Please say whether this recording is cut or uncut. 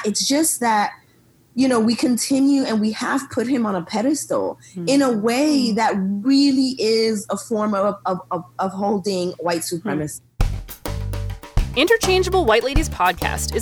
cut